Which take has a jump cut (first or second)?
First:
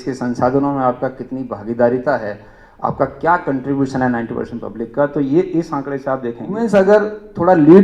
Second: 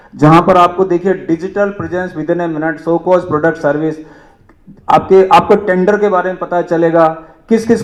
first